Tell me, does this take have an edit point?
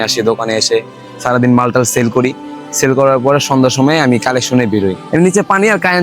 yes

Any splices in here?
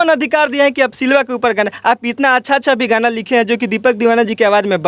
no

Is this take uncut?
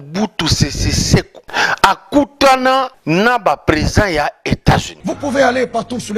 no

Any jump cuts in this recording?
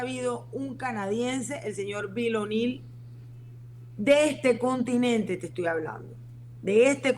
no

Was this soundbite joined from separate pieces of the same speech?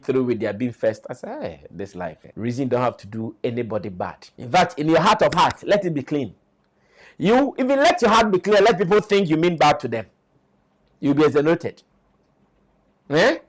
yes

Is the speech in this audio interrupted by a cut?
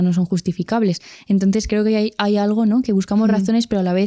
no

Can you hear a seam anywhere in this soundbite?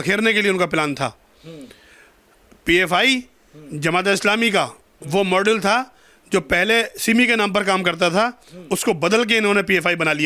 no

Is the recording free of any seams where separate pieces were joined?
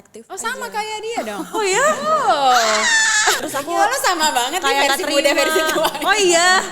no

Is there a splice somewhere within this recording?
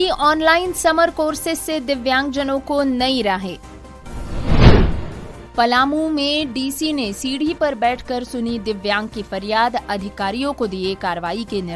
no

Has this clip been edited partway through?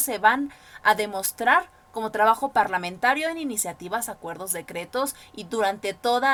no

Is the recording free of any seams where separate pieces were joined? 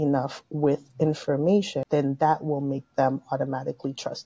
no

